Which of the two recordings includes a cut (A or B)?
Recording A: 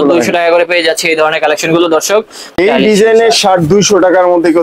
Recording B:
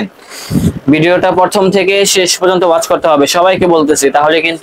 A